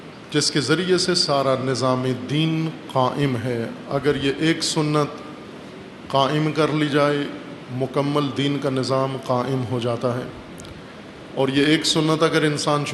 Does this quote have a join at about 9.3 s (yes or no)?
yes